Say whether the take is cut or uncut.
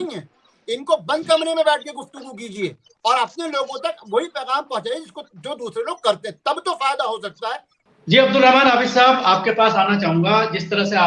uncut